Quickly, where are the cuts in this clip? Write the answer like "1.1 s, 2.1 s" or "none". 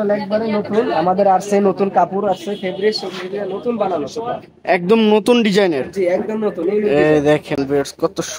none